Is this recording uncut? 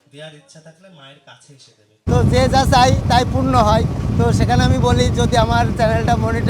no; 1 cut; at 2.1 s

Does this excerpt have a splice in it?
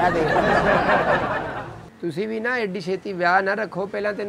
yes; 1 cut; at 1.8 s

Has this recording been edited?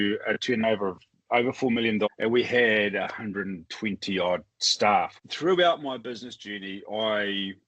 yes; 2 cuts; at 2.1 s, 5.2 s

